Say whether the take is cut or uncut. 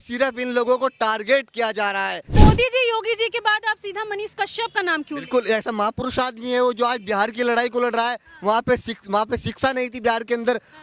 cut